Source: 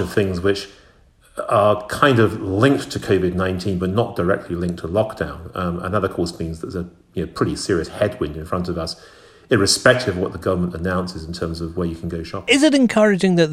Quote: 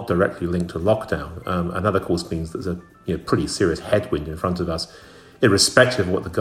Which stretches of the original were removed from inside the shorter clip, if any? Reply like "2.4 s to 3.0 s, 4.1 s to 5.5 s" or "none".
none

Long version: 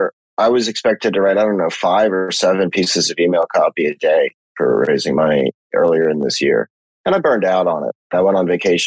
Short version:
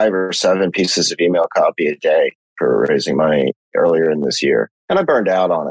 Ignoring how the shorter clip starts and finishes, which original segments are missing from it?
6.8 s to 6.9 s

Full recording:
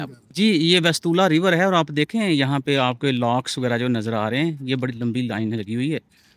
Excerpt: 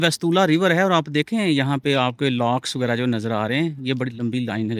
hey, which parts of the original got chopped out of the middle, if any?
none

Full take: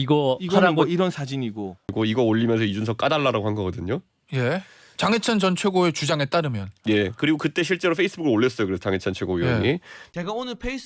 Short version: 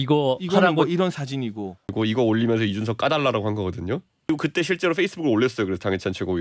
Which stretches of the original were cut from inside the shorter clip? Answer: 4.3 s to 7.3 s

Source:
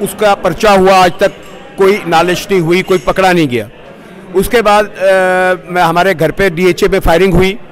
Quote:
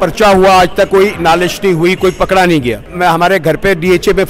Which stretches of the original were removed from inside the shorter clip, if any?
1.3 s to 1.8 s, 3.8 s to 5.6 s

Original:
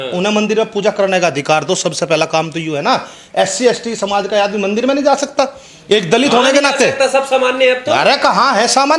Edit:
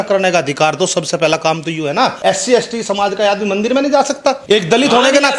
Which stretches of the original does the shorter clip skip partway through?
3.0 s to 3.3 s, 5.5 s to 5.8 s

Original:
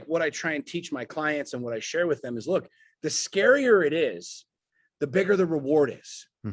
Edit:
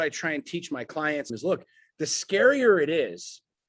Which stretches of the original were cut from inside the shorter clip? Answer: 1.5 s to 2.3 s

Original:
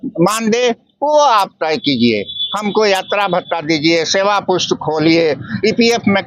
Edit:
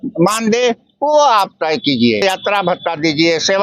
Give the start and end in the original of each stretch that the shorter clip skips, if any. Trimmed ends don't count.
2.2 s to 2.9 s

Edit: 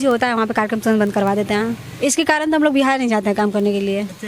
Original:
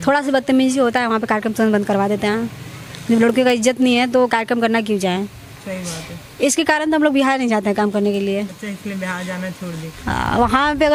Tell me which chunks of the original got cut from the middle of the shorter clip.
2.6 s to 6.2 s

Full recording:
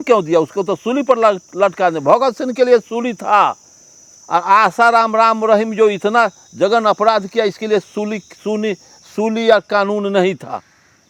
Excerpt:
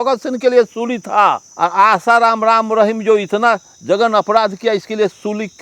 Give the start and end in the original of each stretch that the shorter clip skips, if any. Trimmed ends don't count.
3.6 s to 4.2 s

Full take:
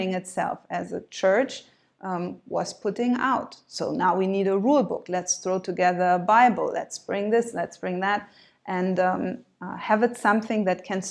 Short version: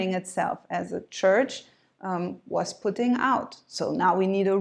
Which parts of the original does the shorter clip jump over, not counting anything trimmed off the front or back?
none

